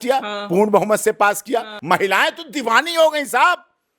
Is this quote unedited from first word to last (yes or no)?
no